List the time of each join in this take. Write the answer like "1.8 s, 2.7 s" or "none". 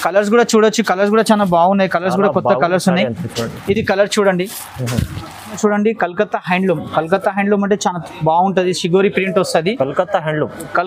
5.6 s